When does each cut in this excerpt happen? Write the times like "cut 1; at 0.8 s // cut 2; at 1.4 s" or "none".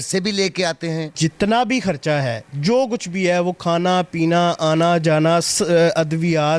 cut 1; at 1.1 s